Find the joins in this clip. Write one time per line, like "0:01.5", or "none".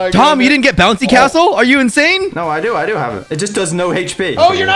none